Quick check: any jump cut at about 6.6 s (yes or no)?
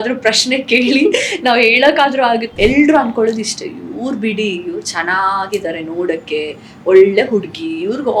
no